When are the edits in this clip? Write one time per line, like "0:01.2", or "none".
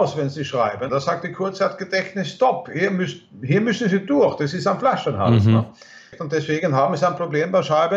0:00.9
0:06.2